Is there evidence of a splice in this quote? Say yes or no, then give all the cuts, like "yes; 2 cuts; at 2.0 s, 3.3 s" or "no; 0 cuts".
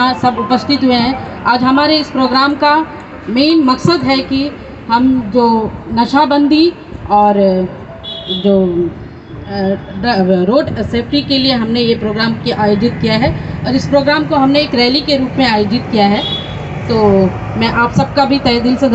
no; 0 cuts